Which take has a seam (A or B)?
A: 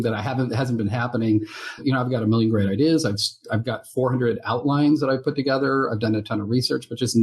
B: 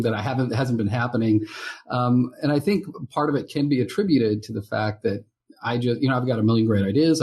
A